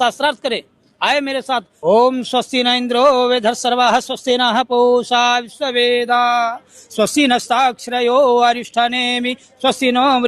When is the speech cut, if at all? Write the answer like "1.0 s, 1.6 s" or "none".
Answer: 1.7 s